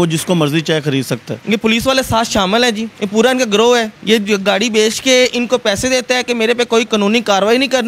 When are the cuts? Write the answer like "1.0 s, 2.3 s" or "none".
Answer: 1.3 s, 2.9 s, 3.9 s, 6.9 s